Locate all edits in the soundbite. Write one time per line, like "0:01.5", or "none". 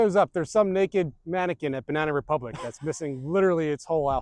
none